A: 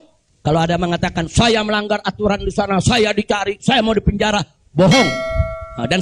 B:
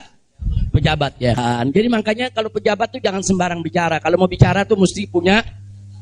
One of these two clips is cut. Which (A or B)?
B